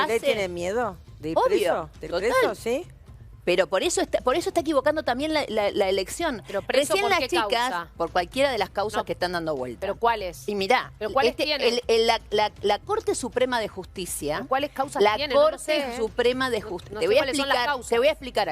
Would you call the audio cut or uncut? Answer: uncut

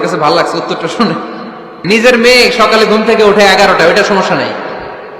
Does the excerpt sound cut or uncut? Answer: cut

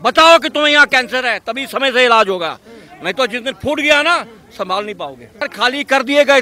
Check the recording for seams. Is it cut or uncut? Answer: cut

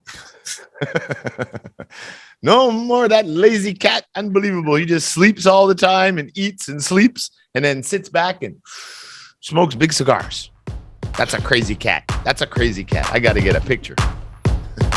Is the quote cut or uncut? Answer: cut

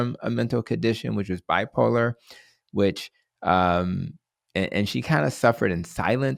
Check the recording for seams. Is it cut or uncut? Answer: uncut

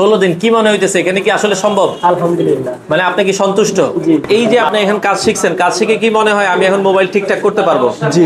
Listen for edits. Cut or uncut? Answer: cut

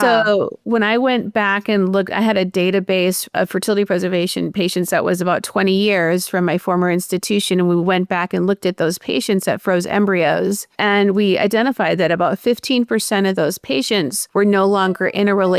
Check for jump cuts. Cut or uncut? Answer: cut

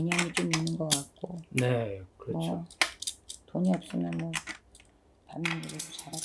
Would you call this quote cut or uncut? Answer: uncut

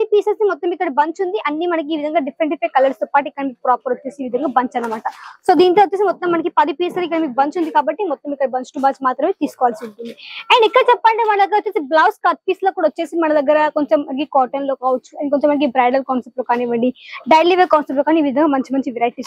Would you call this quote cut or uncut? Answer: uncut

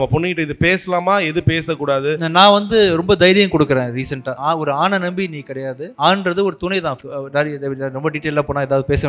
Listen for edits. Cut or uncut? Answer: cut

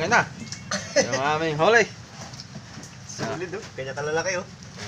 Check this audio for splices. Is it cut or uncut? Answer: uncut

